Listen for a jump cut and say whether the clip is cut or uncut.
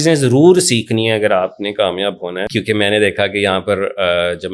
cut